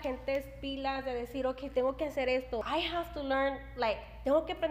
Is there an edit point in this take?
yes; 1 cut; at 2.6 s

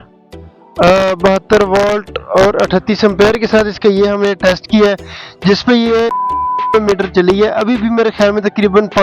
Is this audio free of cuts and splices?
no; 1 cut; at 6.5 s

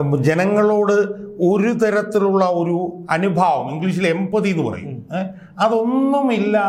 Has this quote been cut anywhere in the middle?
no; 0 cuts

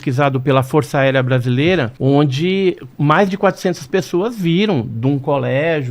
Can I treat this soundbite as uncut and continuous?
no; 1 cut; at 1.9 s

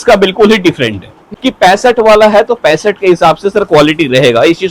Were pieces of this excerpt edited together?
yes; 1 cut; at 1.3 s

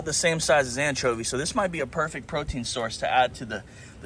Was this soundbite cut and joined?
no; 0 cuts

